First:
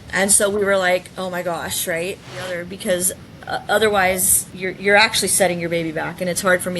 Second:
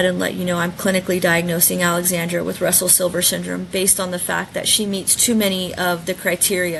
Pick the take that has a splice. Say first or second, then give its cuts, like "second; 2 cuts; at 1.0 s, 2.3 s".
first; 1 cut; at 2.6 s